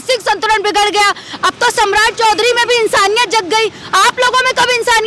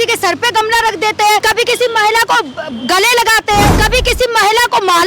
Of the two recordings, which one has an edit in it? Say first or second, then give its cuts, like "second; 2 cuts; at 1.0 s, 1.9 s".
second; 2 cuts; at 1.4 s, 3.7 s